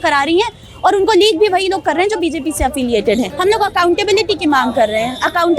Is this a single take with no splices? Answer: no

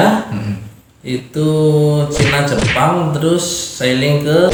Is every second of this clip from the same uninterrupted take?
yes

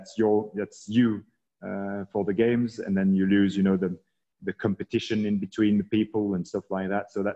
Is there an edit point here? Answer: no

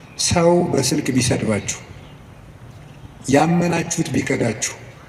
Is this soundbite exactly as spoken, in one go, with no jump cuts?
yes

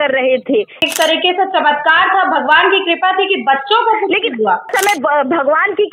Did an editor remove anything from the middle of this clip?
yes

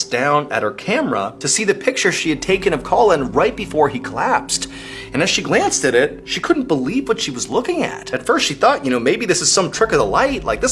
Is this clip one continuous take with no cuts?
yes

